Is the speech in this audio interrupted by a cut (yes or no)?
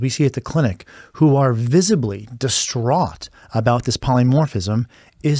no